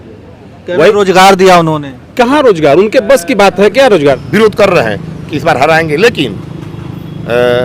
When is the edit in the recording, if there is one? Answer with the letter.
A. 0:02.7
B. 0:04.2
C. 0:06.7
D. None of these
B